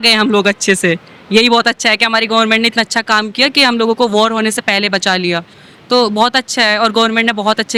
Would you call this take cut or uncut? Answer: uncut